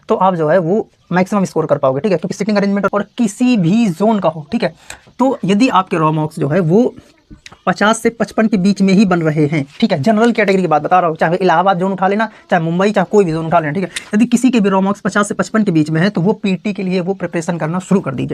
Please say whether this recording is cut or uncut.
cut